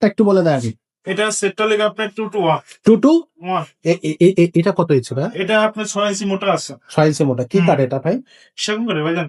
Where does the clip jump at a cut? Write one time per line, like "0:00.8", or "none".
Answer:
none